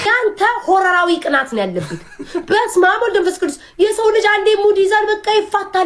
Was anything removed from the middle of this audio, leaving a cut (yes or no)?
no